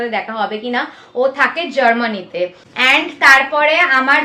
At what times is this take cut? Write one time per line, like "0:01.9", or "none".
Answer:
0:02.9